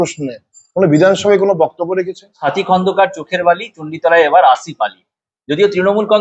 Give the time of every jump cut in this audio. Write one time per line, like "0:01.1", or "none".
0:02.2